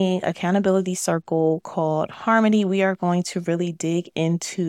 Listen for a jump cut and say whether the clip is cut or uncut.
uncut